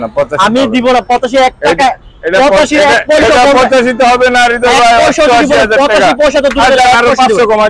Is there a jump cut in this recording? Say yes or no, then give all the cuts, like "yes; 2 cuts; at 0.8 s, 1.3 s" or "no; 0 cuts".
no; 0 cuts